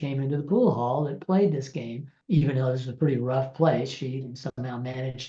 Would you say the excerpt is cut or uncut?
cut